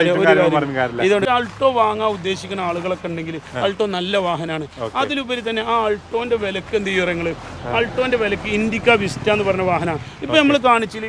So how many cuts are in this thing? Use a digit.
1